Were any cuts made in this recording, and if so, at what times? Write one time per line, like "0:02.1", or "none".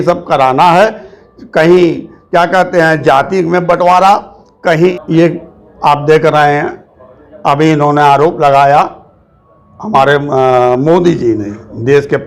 0:04.9